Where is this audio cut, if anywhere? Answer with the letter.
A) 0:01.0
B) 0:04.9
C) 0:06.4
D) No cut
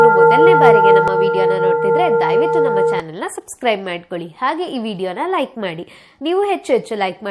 A